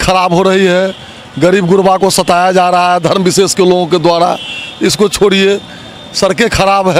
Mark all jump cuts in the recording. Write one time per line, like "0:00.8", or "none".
none

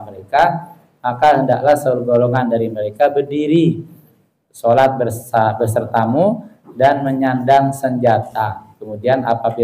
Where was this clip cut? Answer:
none

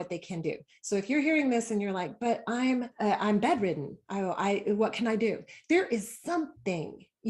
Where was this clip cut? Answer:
0:02.9

